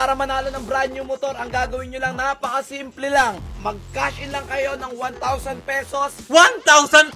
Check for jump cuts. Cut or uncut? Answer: uncut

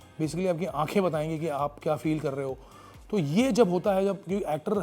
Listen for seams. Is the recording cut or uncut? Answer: uncut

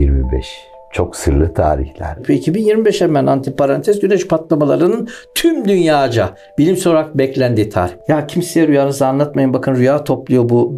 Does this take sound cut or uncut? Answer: cut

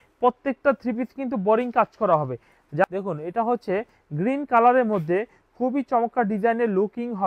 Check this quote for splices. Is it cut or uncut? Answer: cut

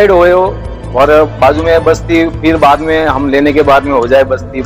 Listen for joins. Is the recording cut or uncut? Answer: uncut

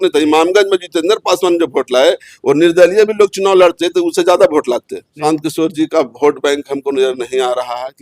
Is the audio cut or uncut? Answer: cut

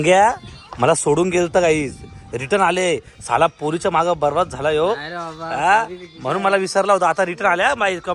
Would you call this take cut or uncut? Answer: uncut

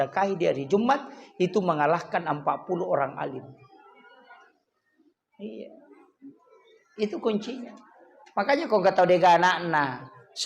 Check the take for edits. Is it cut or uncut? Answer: uncut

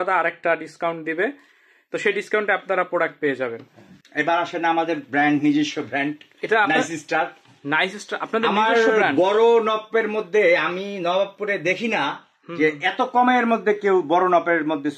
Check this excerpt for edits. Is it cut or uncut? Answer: cut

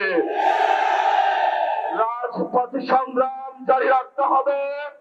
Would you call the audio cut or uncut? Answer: uncut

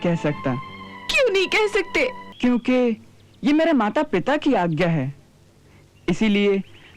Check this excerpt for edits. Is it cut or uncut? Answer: cut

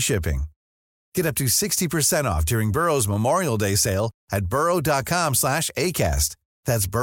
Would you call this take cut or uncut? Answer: uncut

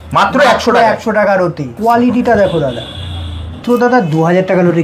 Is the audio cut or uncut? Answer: cut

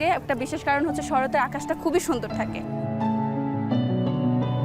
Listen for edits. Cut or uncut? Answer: uncut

